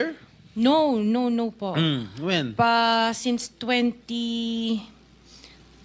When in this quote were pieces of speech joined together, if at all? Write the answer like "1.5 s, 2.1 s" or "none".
none